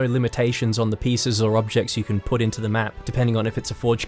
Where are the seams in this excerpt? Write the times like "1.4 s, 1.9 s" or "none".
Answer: 3.0 s